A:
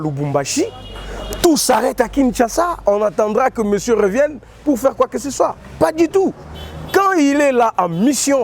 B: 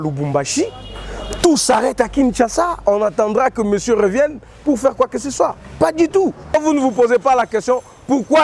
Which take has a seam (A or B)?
B